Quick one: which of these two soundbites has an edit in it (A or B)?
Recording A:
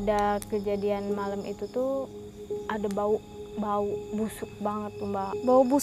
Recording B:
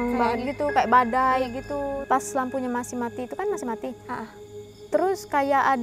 B